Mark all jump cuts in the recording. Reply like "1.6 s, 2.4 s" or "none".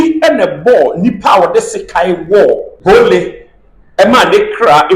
2.7 s